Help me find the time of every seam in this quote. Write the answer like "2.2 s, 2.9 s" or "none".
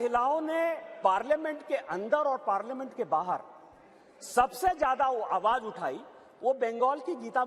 none